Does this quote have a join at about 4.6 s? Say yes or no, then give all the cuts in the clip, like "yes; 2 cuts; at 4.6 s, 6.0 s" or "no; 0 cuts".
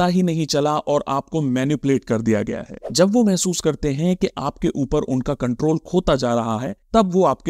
no; 1 cut; at 2.8 s